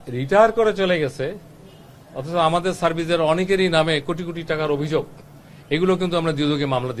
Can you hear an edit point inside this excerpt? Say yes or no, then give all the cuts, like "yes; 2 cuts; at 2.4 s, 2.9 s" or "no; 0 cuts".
no; 0 cuts